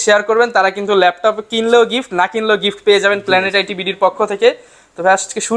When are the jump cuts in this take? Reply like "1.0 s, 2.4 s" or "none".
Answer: none